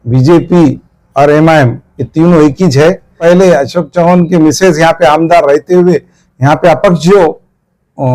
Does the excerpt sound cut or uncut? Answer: cut